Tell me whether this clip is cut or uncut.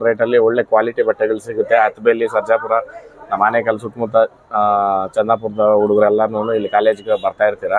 uncut